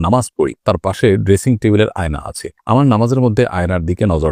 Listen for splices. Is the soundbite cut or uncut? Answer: uncut